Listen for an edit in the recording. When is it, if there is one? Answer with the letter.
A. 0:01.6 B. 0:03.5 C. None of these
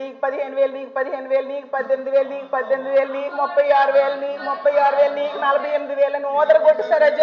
B